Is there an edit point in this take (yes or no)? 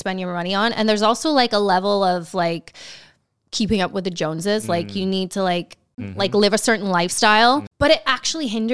yes